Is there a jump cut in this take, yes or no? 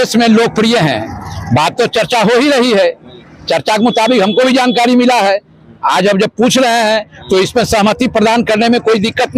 no